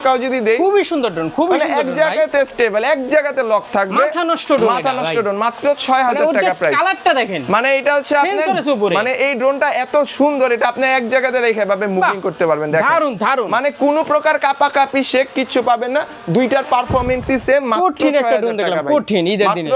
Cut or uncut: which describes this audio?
uncut